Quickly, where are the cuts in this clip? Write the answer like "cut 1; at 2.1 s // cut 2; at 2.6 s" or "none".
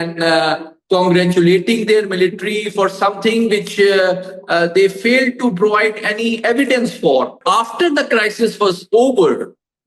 cut 1; at 7.4 s